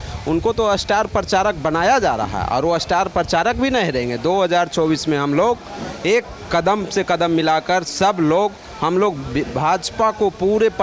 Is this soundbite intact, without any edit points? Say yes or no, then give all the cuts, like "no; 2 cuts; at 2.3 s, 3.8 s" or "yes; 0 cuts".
yes; 0 cuts